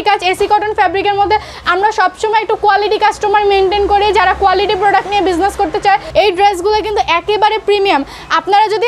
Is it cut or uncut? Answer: cut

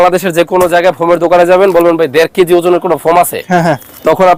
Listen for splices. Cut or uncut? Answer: uncut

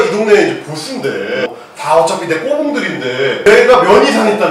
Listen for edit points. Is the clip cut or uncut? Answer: cut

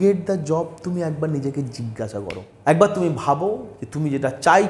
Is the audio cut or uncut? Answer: cut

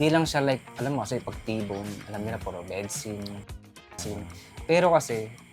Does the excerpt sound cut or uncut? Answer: cut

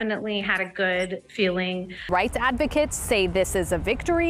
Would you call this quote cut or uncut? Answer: cut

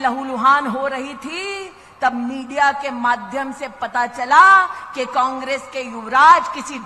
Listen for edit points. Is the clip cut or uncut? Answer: uncut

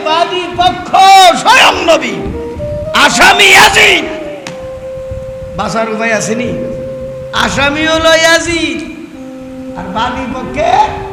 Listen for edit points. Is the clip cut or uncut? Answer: uncut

